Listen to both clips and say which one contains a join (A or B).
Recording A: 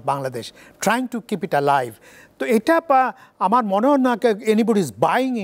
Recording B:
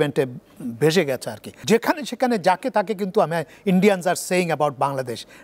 B